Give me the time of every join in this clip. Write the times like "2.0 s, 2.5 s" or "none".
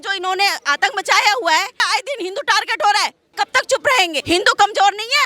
1.9 s, 3.2 s, 4.2 s